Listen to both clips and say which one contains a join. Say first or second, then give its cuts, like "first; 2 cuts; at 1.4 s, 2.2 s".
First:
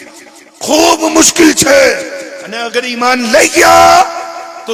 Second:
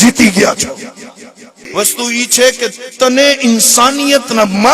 second; 1 cut; at 1.6 s